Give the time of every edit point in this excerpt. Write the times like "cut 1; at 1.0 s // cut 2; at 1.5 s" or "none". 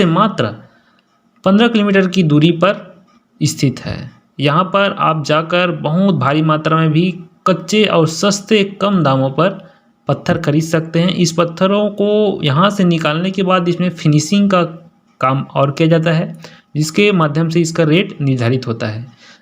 none